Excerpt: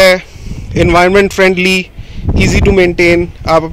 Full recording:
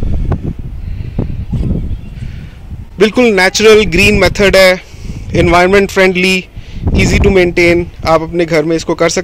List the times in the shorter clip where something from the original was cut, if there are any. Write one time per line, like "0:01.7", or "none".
none